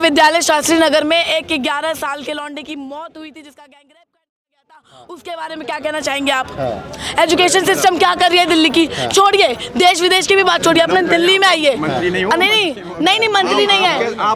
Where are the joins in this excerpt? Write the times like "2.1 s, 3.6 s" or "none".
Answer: none